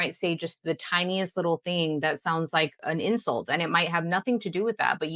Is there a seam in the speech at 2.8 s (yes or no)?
yes